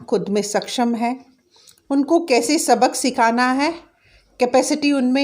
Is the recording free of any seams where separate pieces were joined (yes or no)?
yes